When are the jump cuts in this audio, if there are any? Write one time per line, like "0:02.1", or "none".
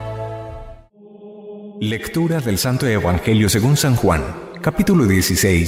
none